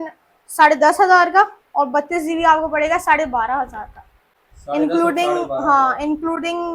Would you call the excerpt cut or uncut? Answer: uncut